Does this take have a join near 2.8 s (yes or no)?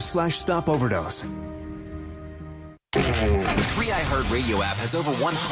no